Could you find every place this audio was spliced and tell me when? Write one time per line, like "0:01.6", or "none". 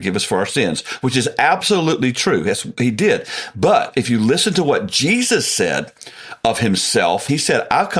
0:03.9
0:07.2

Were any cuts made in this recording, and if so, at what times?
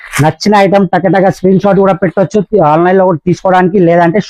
none

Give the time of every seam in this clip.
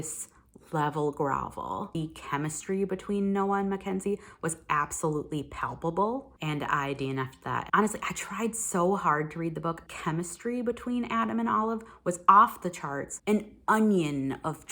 0:01.9
0:06.3
0:07.7
0:09.8
0:13.1

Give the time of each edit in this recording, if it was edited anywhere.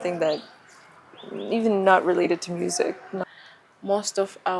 0:03.2

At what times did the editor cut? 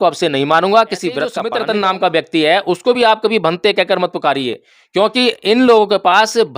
0:01.4

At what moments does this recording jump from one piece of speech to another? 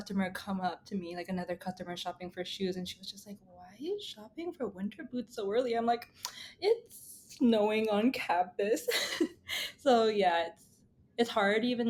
none

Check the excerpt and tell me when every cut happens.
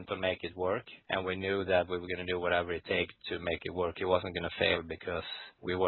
none

